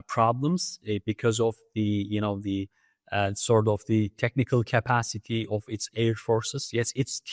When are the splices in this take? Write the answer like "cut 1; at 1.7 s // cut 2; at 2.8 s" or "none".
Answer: none